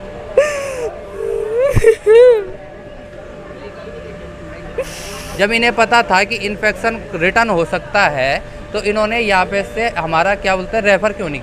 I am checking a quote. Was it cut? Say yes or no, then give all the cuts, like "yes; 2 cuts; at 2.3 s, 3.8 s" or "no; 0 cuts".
yes; 1 cut; at 5.2 s